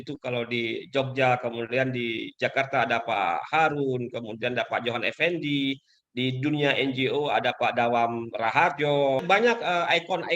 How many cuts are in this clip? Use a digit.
1